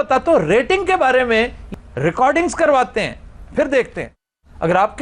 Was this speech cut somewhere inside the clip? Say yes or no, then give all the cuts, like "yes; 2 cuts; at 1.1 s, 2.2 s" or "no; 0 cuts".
yes; 1 cut; at 1.6 s